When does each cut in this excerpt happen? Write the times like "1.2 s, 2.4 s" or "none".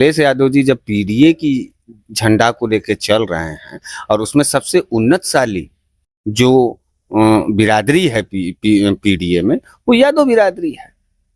none